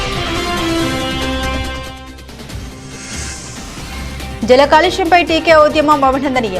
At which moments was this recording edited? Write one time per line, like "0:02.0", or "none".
0:01.8